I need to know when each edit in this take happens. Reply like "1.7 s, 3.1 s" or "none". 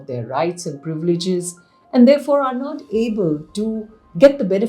none